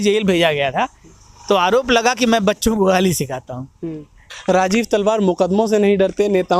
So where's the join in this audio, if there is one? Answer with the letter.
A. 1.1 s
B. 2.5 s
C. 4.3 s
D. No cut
C